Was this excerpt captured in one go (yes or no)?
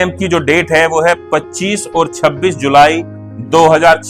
yes